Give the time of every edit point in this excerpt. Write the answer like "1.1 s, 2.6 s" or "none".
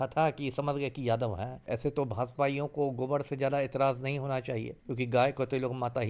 1.6 s, 4.8 s